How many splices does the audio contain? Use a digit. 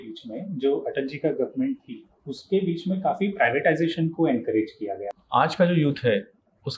1